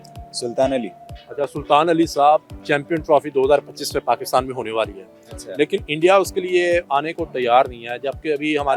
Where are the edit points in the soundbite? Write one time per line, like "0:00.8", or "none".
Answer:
none